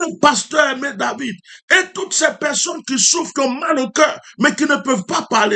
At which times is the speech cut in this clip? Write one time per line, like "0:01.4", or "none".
none